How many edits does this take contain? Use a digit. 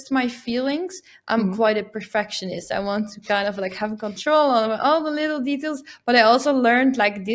0